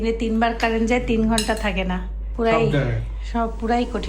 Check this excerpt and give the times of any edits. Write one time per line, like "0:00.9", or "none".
0:02.2